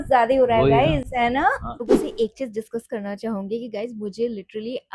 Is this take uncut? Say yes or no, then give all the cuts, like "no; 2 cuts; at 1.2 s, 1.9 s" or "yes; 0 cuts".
yes; 0 cuts